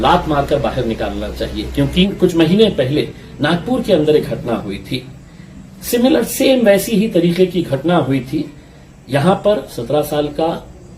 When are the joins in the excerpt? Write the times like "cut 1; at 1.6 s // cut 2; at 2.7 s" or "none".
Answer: cut 1; at 2.1 s